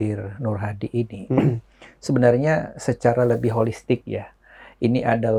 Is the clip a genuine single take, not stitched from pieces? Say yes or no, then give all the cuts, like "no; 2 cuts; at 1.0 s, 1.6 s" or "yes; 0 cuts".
yes; 0 cuts